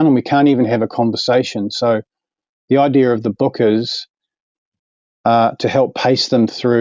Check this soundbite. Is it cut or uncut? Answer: uncut